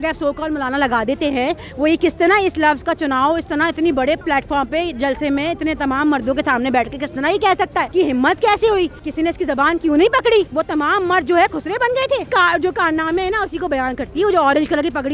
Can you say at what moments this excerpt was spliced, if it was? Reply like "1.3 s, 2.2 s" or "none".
7.9 s, 9.0 s, 10.5 s, 12.3 s